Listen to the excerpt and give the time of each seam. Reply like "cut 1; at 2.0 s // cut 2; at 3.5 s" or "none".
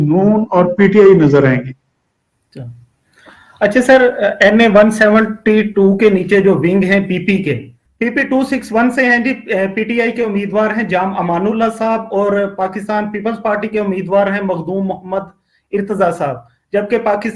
none